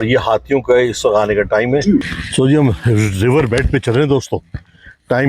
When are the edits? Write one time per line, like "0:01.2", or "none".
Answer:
0:02.1